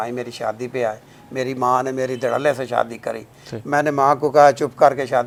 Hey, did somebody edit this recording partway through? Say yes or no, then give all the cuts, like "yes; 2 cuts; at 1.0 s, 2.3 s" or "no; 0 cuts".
no; 0 cuts